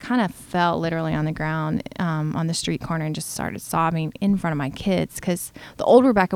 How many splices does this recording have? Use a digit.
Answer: 0